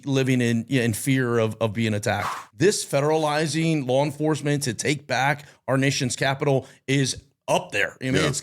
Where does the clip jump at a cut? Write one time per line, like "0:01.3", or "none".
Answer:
0:02.3